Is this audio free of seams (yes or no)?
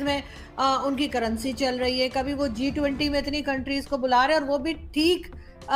yes